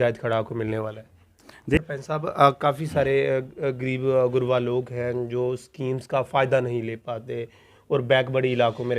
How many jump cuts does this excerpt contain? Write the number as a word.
one